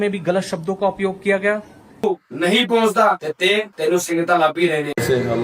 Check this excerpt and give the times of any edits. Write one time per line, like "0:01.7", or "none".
0:02.0